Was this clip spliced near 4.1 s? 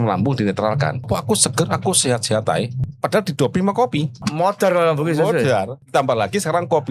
yes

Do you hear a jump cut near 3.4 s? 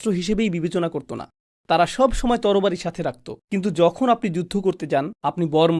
no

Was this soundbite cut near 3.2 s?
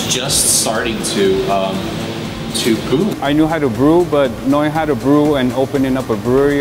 yes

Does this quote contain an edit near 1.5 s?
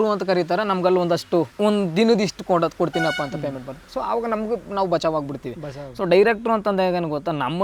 yes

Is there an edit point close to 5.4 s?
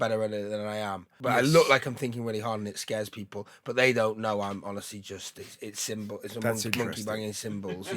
no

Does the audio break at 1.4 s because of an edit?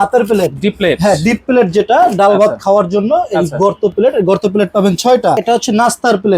no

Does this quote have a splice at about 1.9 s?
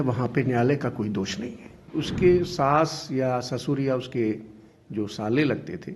yes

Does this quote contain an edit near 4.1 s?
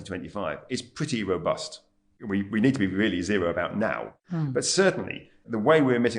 yes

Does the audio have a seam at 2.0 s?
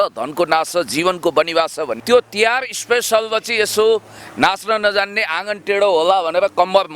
yes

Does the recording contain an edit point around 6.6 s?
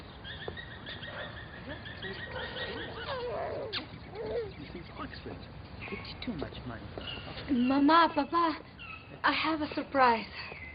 no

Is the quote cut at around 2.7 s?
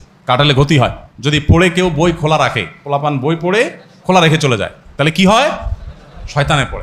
no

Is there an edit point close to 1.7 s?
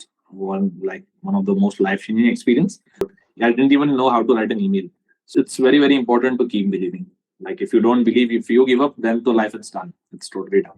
no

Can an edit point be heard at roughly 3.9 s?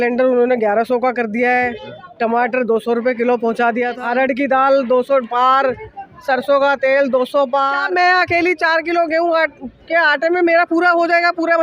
yes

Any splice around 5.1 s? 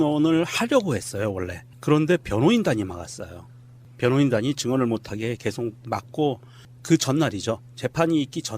yes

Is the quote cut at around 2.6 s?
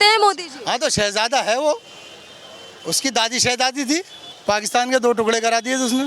no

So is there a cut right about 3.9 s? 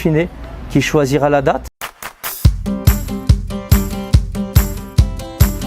no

